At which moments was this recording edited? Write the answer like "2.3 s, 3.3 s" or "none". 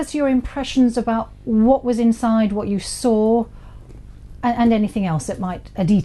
4.3 s